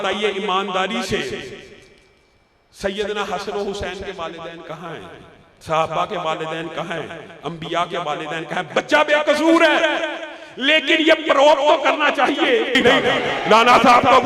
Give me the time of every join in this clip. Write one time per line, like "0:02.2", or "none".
0:12.8